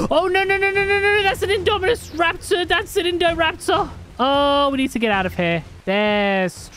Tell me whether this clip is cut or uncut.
cut